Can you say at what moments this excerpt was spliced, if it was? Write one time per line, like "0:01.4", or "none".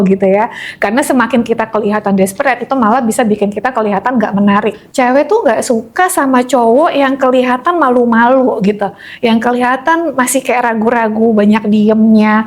0:04.8